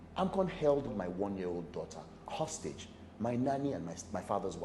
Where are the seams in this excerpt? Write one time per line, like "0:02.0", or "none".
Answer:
0:00.9
0:02.1